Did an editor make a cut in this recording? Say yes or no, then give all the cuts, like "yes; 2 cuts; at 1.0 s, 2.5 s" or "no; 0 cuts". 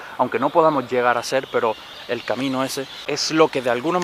yes; 1 cut; at 3.0 s